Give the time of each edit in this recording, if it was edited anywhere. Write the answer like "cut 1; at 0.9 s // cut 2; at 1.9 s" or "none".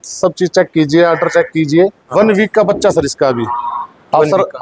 cut 1; at 2.0 s

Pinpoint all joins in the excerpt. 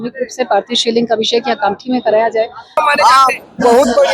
cut 1; at 2.8 s

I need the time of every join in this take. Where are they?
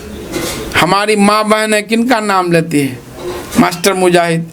none

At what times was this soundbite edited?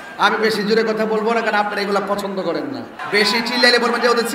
cut 1; at 2.9 s

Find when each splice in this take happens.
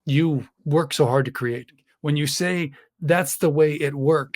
none

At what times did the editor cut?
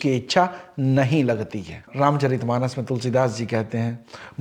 cut 1; at 1.8 s

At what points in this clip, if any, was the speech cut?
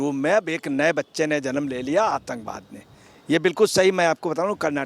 none

